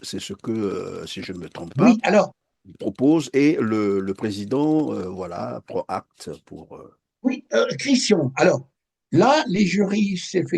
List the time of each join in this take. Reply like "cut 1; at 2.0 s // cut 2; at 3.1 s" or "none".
none